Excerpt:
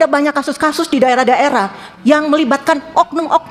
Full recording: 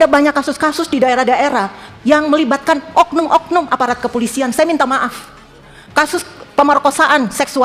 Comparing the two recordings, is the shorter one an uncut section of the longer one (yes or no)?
yes